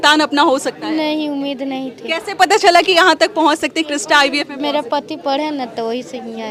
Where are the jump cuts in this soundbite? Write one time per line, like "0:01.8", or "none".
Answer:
none